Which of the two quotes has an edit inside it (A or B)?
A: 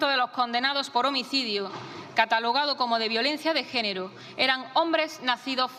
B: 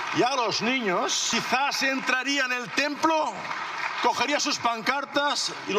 B